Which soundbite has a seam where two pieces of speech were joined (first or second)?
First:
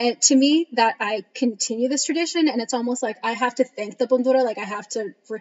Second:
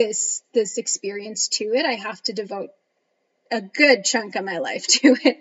first